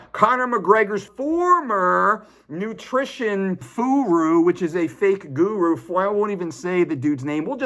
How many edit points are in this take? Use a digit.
2